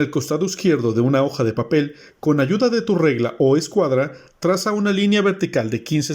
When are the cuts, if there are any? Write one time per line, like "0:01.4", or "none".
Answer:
0:04.2

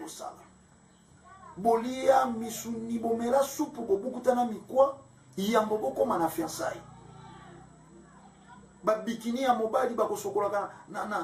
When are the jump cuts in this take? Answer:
0:08.5

